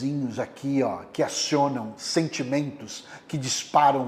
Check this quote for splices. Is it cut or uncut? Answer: uncut